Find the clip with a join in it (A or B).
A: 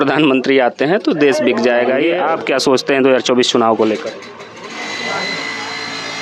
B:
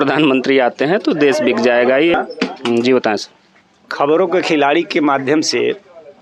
A